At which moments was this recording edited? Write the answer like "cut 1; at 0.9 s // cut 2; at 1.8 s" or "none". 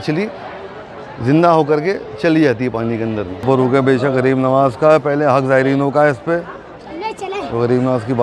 cut 1; at 3.4 s